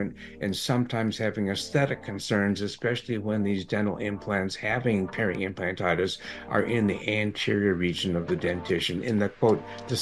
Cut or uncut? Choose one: uncut